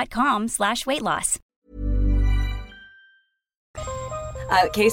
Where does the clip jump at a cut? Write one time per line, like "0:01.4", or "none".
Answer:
none